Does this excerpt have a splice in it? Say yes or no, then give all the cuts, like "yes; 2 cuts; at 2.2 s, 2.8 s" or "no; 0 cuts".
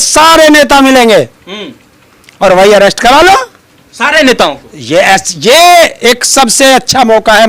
no; 0 cuts